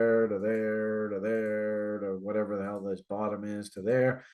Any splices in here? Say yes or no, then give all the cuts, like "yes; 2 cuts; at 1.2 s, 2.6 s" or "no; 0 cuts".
no; 0 cuts